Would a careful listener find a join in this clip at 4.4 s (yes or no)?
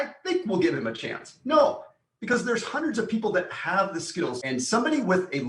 yes